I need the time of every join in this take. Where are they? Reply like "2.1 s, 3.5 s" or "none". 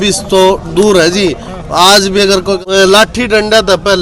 2.6 s